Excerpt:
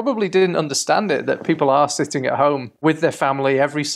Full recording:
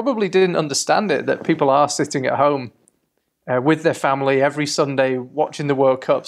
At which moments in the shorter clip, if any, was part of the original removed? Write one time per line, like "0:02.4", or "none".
0:02.8